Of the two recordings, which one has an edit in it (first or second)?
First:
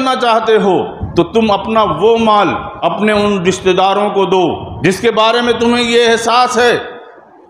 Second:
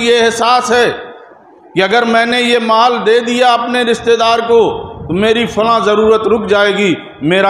first